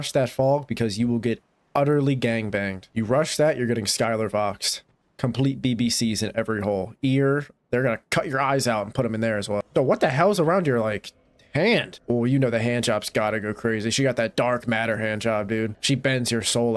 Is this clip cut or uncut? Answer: cut